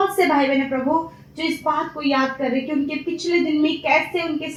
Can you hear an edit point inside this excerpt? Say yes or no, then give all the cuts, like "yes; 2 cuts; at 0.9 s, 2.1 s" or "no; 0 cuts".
no; 0 cuts